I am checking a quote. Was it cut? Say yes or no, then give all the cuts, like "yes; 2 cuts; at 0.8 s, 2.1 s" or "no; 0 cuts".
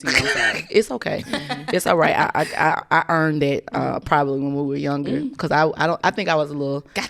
no; 0 cuts